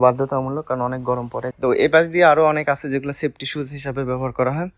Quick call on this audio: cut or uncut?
cut